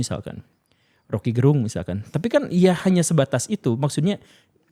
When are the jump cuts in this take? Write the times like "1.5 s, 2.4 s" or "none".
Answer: none